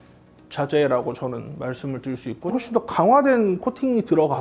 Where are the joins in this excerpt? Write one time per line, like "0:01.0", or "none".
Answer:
0:02.5